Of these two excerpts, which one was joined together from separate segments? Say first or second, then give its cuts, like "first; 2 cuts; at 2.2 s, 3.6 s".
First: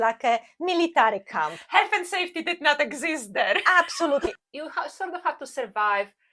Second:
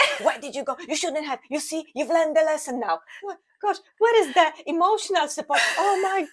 first; 1 cut; at 4.3 s